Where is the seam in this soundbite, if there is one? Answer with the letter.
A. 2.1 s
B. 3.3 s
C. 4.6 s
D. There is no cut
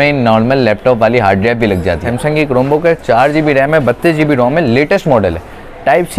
A